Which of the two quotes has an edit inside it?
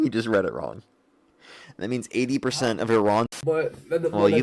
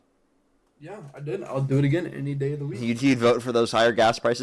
first; 1 cut; at 3.3 s

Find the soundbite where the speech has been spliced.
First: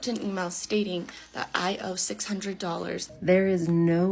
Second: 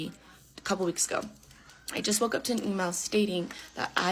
first; 1 cut; at 3.1 s

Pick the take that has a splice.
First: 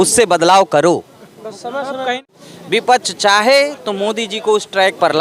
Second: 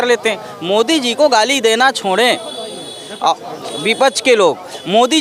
first; 1 cut; at 2.1 s

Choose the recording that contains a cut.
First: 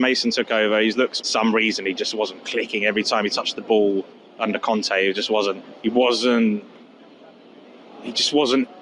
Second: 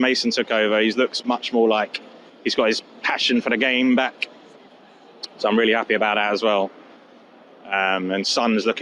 first; 2 cuts; at 1.2 s, 5.7 s

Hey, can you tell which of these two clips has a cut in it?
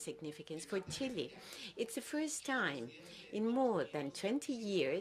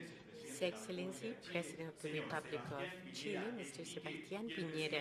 first; 1 cut; at 3.7 s

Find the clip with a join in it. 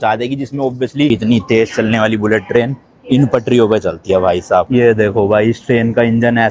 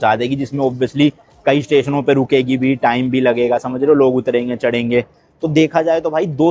first; 2 cuts; at 1.1 s, 4.7 s

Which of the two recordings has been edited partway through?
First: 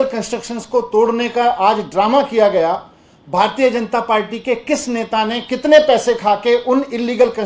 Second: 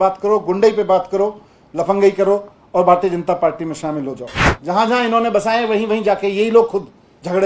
second; 1 cut; at 4.5 s

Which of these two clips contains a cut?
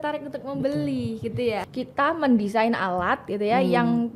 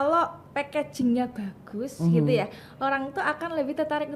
first; 1 cut; at 1.6 s

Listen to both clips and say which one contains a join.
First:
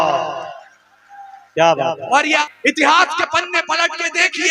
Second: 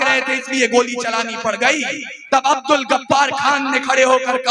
first; 1 cut; at 2.4 s

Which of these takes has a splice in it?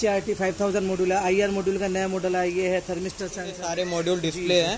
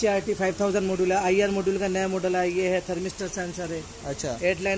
first; 1 cut; at 3.7 s

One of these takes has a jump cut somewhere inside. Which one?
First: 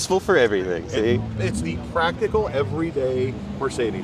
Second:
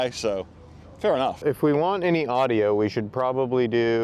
second; 1 cut; at 1.4 s

